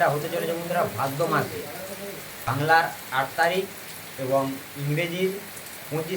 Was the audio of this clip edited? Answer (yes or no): yes